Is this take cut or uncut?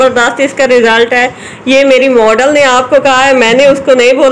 uncut